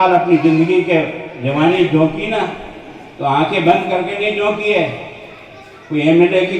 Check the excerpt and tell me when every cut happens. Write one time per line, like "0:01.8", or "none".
none